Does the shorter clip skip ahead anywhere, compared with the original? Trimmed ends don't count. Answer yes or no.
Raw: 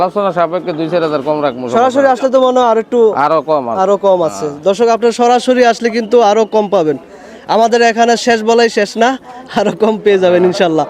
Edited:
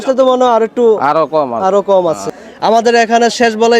yes